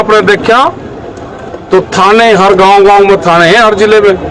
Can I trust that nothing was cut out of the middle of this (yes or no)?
yes